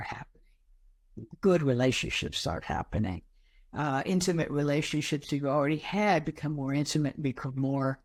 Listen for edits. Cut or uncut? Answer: uncut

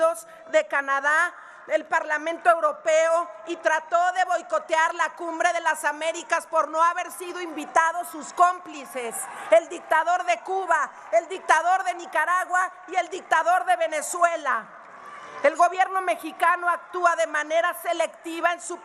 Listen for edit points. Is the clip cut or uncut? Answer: uncut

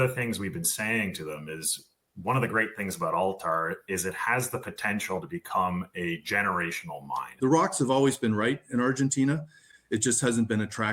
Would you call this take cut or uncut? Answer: cut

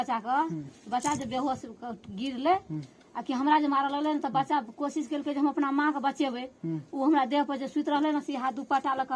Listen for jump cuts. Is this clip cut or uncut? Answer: uncut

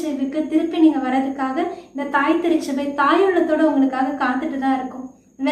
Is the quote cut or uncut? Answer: uncut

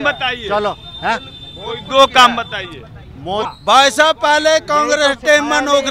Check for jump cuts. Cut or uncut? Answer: cut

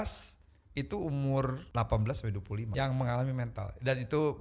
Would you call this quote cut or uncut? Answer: cut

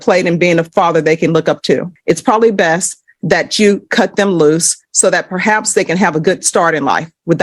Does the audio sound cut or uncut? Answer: cut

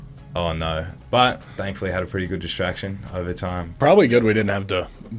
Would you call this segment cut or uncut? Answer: cut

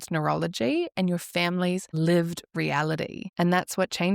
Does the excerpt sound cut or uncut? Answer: cut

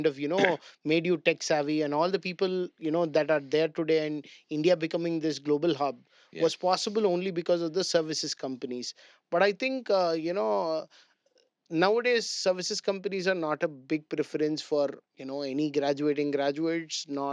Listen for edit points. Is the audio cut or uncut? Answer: uncut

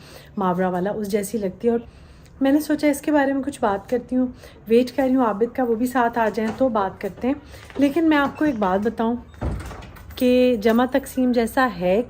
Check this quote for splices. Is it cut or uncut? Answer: cut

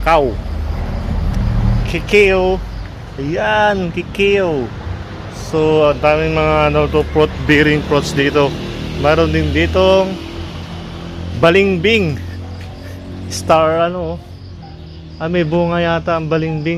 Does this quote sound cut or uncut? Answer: uncut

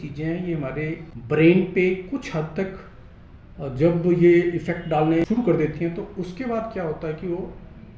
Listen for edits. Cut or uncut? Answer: cut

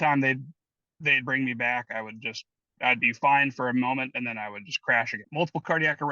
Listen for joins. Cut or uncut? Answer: cut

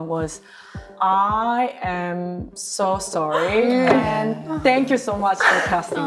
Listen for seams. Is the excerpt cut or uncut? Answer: uncut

